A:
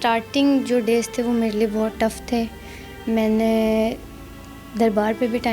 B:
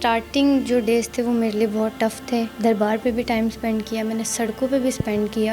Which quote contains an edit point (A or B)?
B